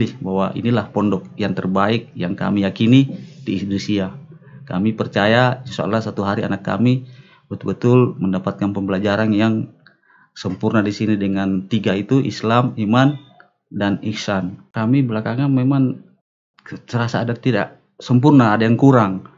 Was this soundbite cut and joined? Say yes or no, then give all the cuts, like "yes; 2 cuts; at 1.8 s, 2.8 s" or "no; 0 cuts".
yes; 1 cut; at 14.6 s